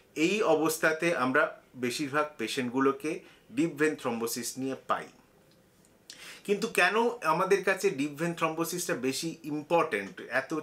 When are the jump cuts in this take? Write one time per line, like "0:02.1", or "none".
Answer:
none